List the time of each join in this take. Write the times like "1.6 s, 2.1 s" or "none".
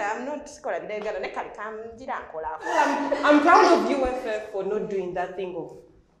2.7 s